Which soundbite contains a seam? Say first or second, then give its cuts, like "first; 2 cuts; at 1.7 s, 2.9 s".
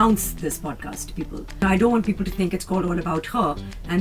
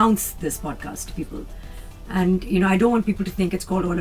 first; 1 cut; at 1.6 s